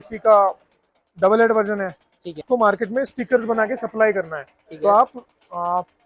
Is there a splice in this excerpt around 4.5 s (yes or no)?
no